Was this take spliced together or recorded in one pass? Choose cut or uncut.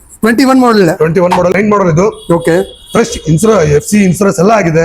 cut